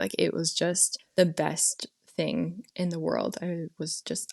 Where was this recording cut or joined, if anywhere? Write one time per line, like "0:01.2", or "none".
0:00.9

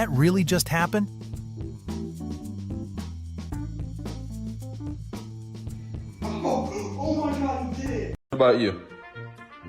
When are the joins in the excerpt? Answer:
0:08.3

